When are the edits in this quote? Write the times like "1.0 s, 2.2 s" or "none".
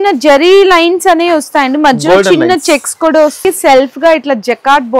3.4 s